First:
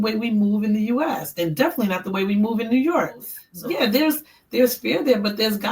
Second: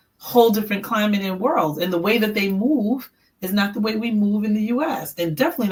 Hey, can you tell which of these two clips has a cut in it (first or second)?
first